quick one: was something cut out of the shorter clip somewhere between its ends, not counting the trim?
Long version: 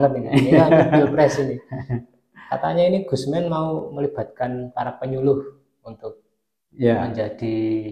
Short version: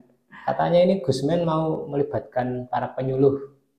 no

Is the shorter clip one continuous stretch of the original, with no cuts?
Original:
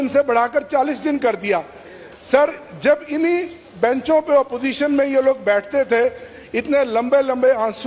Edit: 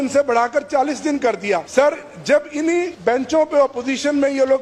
no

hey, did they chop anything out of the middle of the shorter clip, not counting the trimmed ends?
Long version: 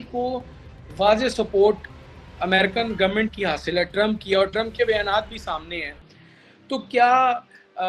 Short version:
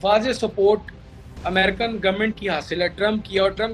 no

